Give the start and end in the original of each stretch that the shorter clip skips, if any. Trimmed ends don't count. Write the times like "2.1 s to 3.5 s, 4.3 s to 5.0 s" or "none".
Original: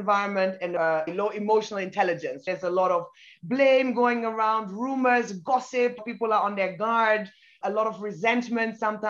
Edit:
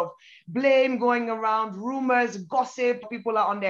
none